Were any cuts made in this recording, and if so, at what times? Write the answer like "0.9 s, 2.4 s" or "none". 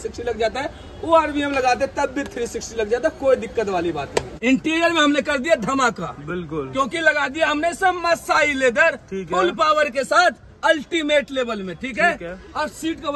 4.3 s